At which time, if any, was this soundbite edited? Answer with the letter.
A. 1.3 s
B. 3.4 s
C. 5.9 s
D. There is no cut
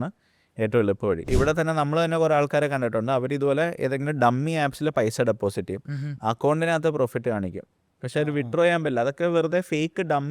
A